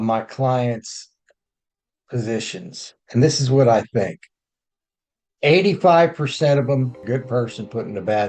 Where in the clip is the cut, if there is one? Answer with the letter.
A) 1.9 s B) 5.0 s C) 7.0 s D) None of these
C